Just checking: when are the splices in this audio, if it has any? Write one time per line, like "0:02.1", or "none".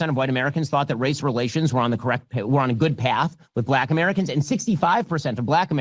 none